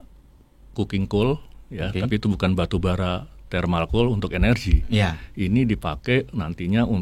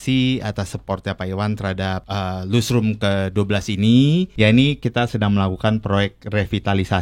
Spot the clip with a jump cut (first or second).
second